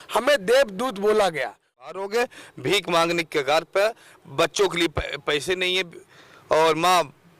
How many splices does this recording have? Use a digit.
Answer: 1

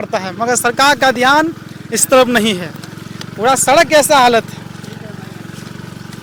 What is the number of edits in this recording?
0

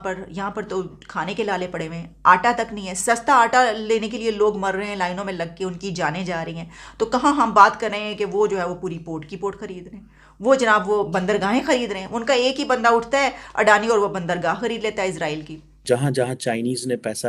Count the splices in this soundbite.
1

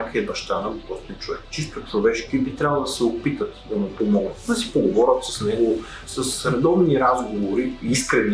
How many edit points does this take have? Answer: 3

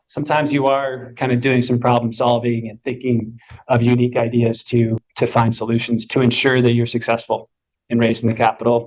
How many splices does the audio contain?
1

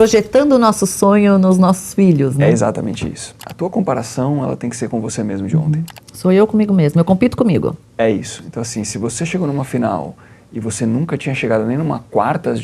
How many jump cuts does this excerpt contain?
1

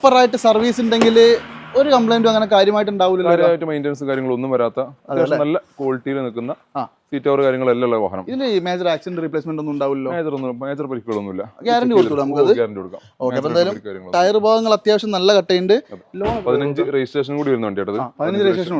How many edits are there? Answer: 0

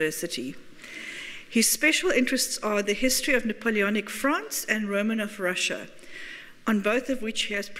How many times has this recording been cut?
1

